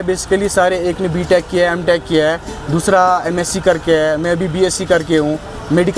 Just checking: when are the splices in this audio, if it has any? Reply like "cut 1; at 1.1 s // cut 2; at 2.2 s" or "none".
none